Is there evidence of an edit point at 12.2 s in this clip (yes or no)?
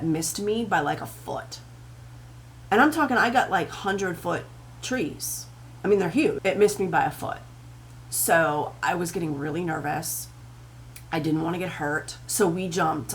yes